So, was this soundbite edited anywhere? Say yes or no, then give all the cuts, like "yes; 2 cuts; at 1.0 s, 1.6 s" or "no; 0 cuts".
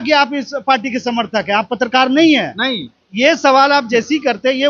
no; 0 cuts